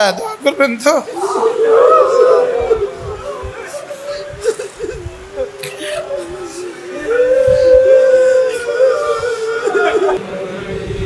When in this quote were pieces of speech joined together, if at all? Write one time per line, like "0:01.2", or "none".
0:10.2

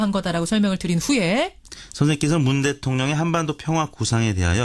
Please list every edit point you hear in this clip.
none

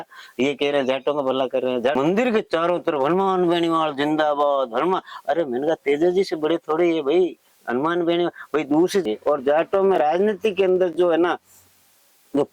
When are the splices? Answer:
0:02.0
0:09.0

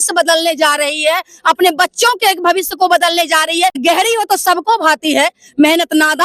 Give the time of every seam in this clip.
0:03.8

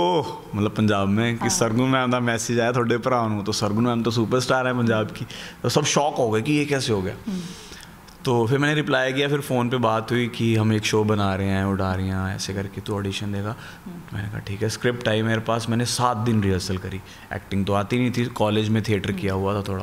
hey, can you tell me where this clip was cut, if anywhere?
none

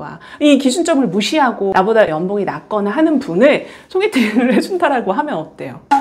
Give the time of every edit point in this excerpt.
none

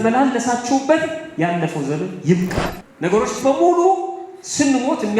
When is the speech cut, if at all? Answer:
0:02.8

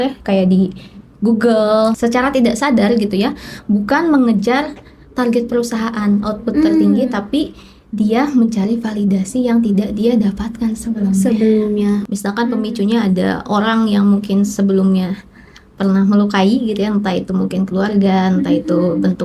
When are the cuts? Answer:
0:02.0
0:12.0

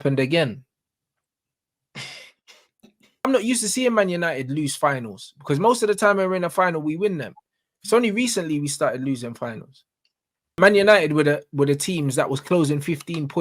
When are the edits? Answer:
0:03.3
0:10.6

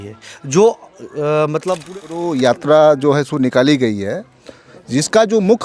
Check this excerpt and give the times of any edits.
0:01.8

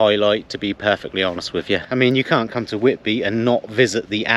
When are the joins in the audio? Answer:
0:01.9

